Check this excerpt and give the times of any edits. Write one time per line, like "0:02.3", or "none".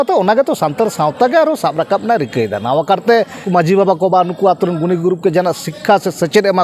0:03.4